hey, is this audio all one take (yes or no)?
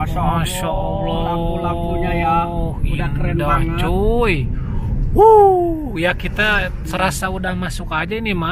yes